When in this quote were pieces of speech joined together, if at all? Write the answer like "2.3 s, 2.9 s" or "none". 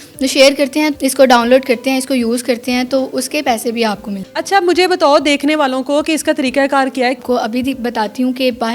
0.9 s, 4.3 s, 7.2 s